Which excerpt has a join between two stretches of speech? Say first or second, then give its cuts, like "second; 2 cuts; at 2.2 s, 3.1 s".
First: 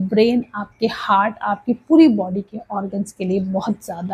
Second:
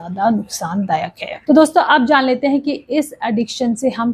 second; 1 cut; at 1.3 s